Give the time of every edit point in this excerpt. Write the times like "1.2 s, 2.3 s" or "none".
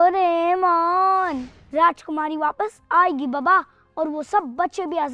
1.5 s

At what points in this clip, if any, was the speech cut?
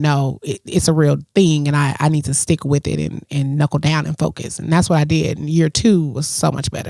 none

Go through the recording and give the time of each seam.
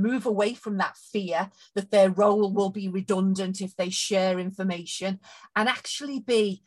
none

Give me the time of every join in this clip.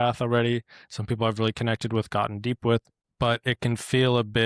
3.0 s

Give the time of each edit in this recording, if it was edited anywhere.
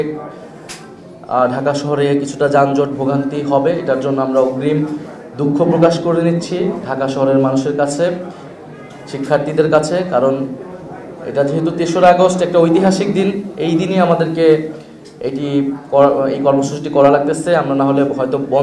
none

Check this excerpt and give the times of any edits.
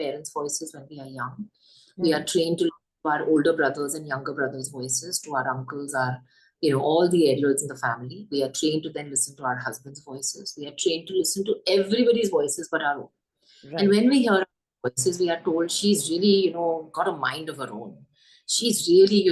none

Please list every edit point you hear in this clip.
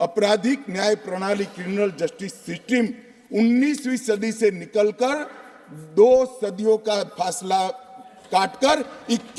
none

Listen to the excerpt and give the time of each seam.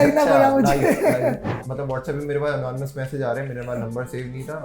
1.6 s

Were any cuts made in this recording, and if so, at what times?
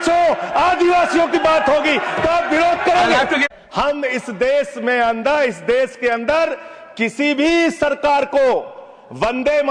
3.5 s

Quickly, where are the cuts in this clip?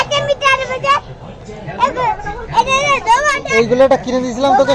none

